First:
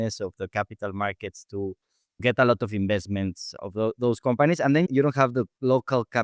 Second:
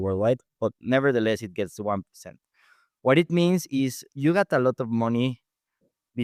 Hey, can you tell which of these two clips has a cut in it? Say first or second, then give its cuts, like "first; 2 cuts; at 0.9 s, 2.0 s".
first; 2 cuts; at 2.2 s, 4.9 s